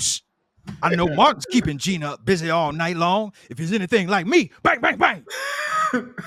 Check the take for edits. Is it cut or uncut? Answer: uncut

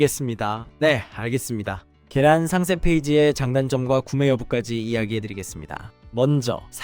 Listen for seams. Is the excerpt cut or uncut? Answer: uncut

